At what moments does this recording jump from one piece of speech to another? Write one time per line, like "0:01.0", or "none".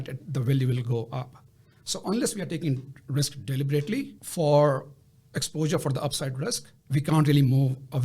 0:06.7